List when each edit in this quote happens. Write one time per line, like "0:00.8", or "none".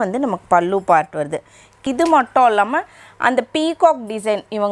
0:01.8